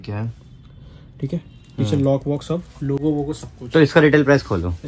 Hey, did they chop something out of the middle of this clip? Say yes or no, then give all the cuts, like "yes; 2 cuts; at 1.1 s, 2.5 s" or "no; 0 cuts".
no; 0 cuts